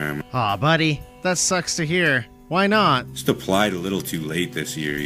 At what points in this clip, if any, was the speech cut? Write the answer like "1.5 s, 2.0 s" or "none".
none